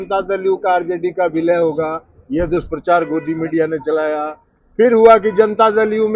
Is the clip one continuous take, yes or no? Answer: yes